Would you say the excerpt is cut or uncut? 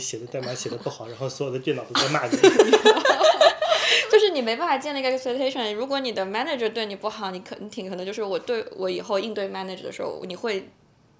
uncut